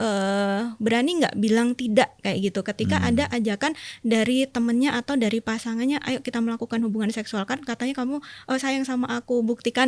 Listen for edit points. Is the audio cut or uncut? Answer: uncut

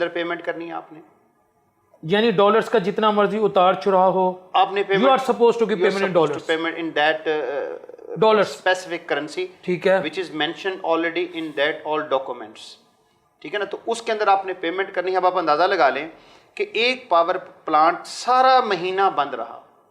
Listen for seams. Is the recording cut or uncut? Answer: uncut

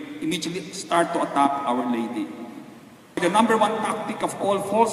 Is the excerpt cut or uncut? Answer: cut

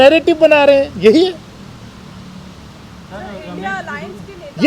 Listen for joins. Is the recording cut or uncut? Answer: uncut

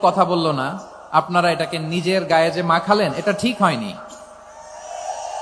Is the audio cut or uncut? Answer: uncut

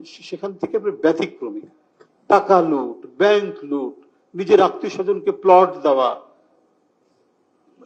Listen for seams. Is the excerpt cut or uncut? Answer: uncut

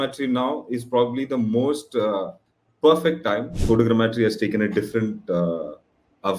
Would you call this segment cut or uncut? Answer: cut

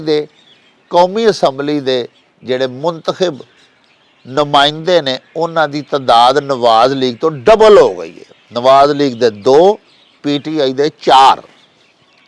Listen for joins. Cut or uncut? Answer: uncut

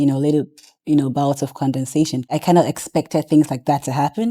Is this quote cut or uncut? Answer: cut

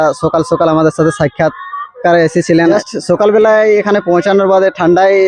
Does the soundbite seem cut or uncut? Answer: cut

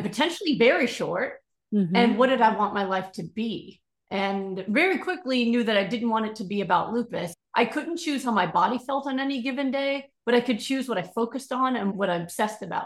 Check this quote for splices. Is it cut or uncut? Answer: cut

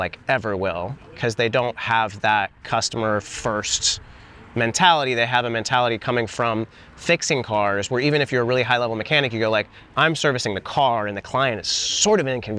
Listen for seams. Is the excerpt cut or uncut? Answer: uncut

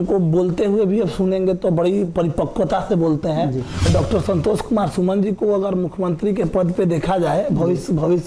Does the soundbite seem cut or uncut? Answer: cut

